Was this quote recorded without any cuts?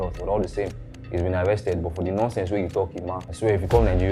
no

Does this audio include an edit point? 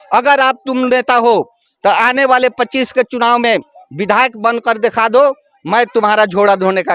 no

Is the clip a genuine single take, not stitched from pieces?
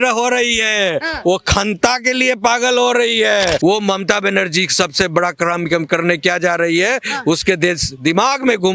no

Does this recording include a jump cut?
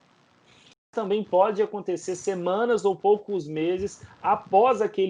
yes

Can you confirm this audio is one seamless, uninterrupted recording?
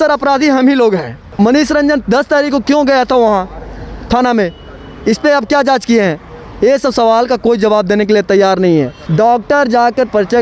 no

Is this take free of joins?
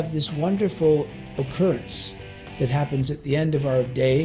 yes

